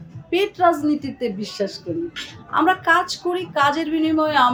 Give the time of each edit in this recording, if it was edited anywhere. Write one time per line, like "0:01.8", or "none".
none